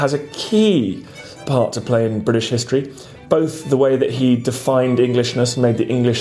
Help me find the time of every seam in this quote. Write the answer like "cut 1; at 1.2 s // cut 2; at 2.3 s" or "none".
cut 1; at 1.4 s